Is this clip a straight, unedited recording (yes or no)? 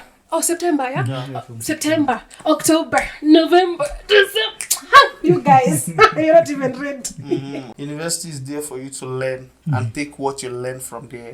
no